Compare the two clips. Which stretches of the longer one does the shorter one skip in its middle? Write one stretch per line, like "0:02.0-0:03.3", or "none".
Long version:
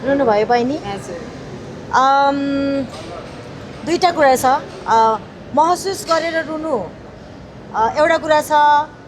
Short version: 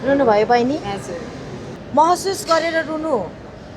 0:01.7-0:05.3